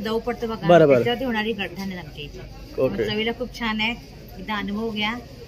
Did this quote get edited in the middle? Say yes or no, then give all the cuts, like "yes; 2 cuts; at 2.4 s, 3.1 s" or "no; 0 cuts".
no; 0 cuts